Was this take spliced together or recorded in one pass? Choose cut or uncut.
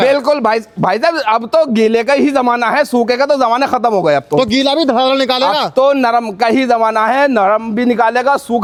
uncut